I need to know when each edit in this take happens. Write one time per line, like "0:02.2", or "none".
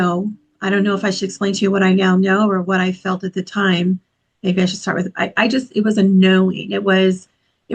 none